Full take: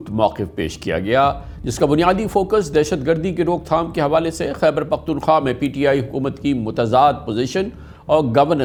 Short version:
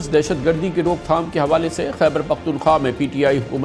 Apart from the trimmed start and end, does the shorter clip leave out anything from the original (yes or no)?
no